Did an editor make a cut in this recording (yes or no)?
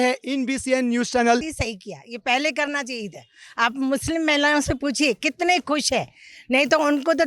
yes